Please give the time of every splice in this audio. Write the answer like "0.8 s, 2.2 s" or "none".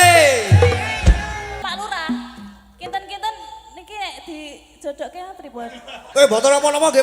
1.6 s, 6.0 s